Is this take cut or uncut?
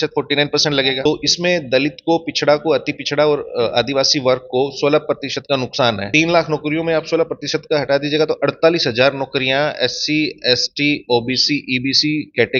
cut